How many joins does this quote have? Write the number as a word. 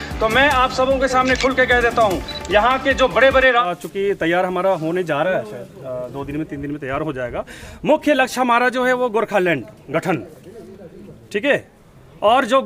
one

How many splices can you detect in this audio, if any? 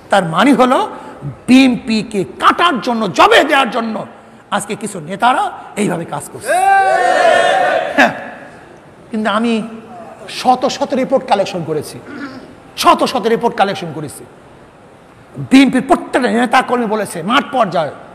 zero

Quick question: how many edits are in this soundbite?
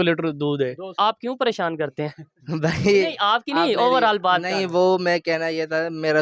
one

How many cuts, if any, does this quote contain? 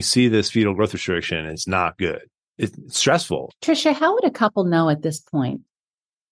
two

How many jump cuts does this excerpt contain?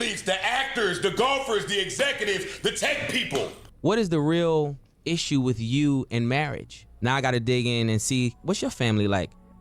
one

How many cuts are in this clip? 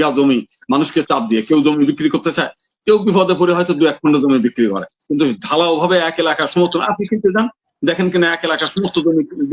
zero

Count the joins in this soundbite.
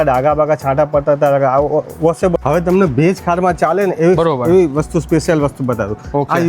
one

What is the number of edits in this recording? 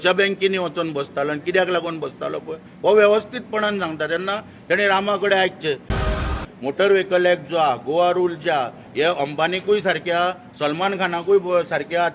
one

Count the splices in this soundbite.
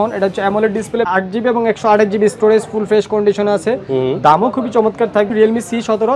two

